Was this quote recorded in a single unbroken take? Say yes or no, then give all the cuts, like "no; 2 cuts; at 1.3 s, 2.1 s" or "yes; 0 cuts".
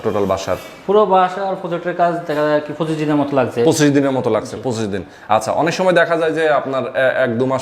yes; 0 cuts